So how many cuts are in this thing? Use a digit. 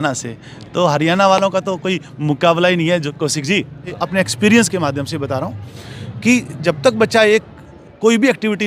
1